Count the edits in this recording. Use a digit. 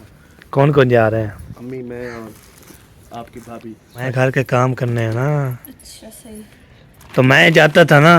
1